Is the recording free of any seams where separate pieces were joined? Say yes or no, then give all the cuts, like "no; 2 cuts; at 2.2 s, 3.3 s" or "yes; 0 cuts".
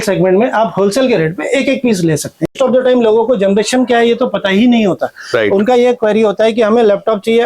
no; 1 cut; at 2.5 s